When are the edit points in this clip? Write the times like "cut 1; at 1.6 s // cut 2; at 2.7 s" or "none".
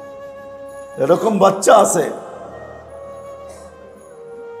none

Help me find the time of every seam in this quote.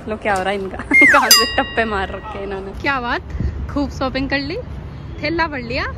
cut 1; at 2.8 s

